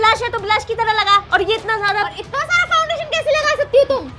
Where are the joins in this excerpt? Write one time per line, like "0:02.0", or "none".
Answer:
none